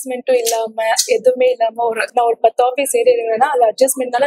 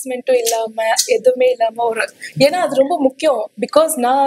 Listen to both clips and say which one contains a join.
first; 1 cut; at 2.0 s

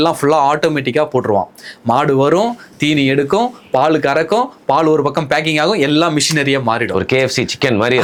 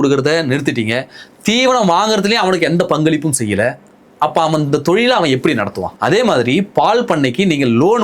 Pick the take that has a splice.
second; 1 cut; at 5.9 s

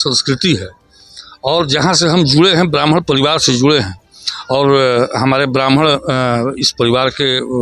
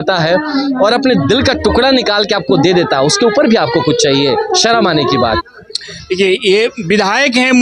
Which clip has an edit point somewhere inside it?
second; 1 cut; at 5.4 s

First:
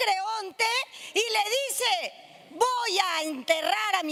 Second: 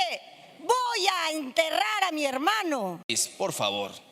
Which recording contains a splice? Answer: second; 1 cut; at 3.2 s

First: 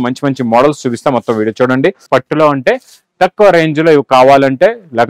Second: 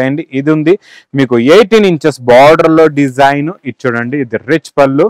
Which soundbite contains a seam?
first; 1 cut; at 2.0 s

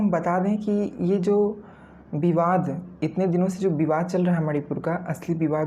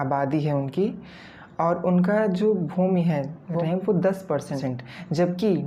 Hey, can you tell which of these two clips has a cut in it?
second; 2 cuts; at 3.6 s, 4.6 s

